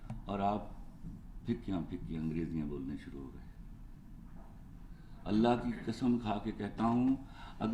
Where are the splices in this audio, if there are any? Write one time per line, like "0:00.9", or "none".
none